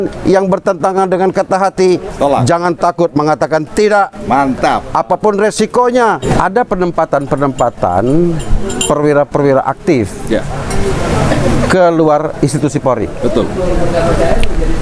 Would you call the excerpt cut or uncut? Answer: cut